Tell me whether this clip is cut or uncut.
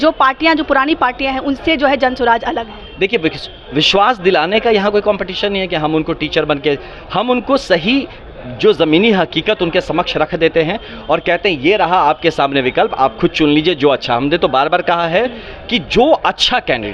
uncut